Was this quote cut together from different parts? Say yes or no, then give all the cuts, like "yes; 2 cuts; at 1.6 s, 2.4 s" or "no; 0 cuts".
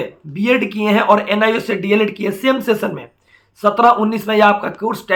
no; 0 cuts